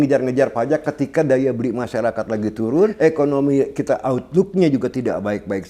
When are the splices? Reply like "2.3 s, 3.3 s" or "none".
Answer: 2.9 s